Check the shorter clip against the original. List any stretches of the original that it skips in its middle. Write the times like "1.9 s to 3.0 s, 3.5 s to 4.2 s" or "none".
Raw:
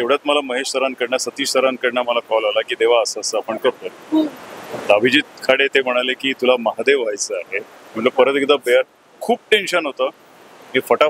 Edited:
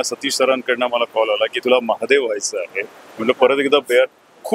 2.7 s to 6.3 s

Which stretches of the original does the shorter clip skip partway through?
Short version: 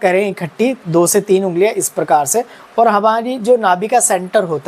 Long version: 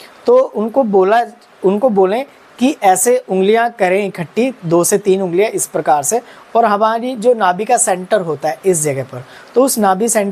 none

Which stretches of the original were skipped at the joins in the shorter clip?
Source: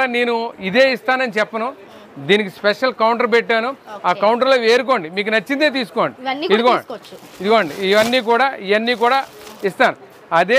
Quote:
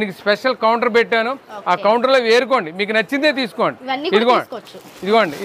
none

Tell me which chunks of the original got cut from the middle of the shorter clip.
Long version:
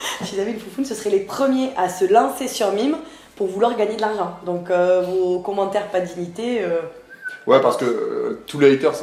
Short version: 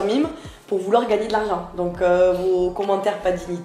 none

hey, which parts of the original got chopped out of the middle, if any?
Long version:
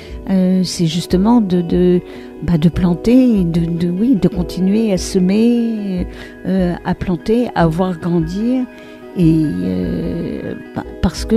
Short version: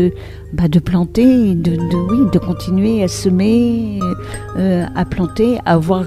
none

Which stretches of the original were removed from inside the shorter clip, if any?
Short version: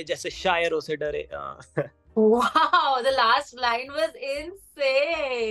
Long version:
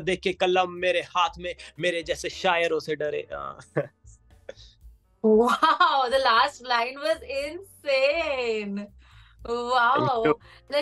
4.0 s to 5.1 s

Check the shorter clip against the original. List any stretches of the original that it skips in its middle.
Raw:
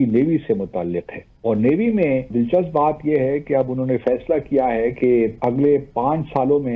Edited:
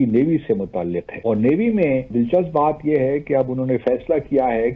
1.1 s to 1.3 s

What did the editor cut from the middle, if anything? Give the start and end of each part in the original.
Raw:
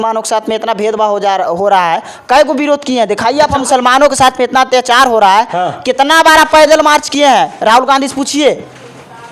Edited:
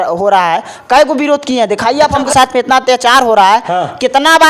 3.7 s to 4.1 s

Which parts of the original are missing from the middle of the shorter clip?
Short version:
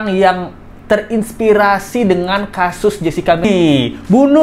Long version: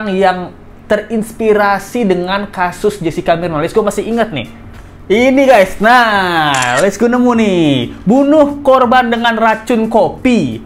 3.4 s to 7.4 s

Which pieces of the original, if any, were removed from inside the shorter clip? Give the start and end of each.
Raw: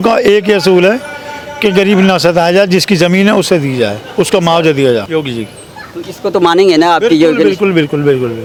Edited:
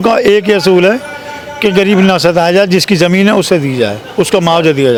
none

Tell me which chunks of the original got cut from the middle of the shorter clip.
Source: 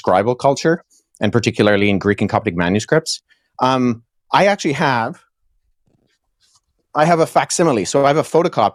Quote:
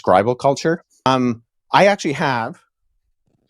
1.1 s to 3.7 s

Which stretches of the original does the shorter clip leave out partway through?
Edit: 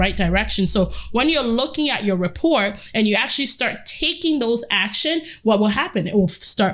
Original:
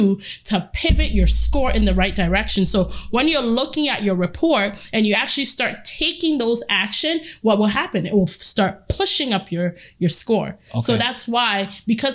none

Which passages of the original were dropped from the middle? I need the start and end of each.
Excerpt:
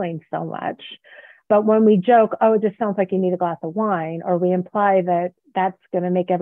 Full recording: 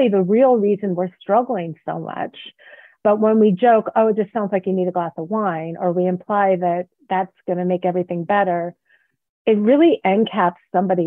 none

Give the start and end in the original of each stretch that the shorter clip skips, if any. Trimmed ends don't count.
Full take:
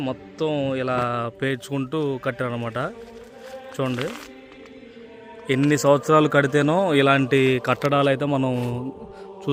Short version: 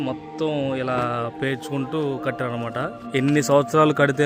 3.0 s to 5.3 s

